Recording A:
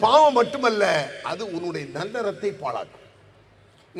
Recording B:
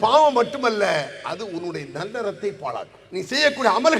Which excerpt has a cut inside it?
B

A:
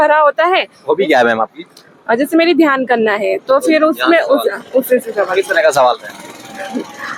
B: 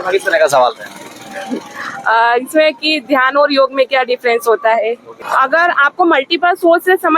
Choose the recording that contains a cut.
B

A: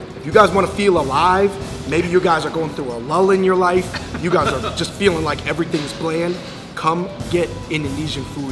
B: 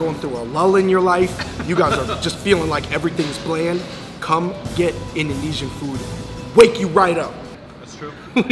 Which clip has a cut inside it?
B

